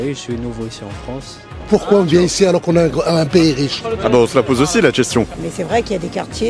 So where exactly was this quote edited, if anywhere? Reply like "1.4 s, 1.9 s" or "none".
1.6 s, 5.3 s